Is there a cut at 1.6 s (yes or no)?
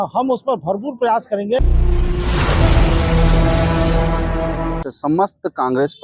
yes